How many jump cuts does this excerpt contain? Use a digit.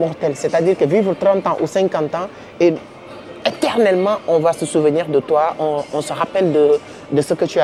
0